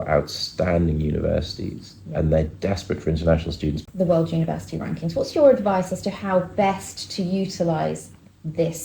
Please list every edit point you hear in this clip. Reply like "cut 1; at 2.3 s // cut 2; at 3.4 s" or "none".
cut 1; at 3.8 s